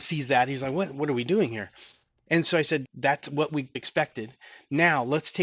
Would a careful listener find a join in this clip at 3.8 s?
yes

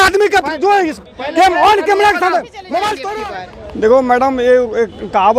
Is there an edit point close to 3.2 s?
yes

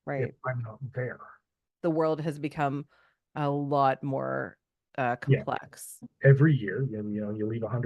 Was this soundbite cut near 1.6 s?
yes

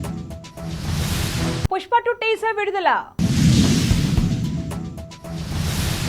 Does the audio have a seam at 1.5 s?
yes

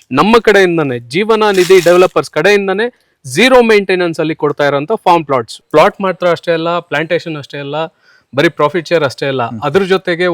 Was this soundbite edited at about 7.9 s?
no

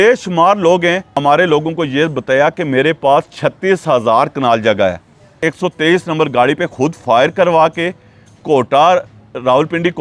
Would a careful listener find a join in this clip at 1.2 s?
yes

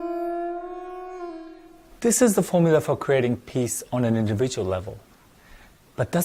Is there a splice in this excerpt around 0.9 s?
no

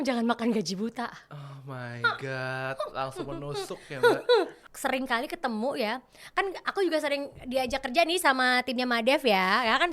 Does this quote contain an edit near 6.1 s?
no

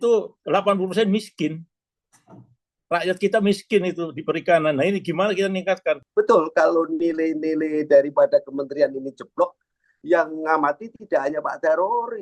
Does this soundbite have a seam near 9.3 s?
no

